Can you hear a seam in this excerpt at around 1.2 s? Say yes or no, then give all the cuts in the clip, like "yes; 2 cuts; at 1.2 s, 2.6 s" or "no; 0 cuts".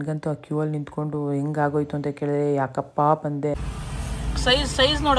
no; 1 cut; at 3.6 s